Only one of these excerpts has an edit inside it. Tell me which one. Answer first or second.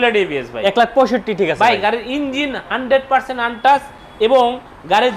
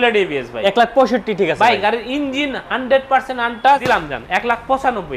second